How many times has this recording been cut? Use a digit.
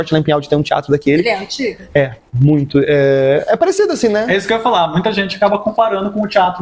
0